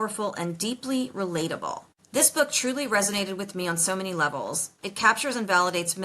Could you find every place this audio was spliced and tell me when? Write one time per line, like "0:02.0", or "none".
0:01.9